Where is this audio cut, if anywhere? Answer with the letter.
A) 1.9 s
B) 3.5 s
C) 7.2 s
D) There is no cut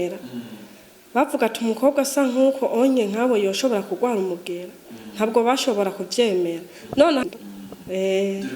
C